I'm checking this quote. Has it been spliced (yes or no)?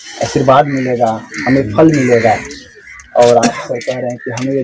no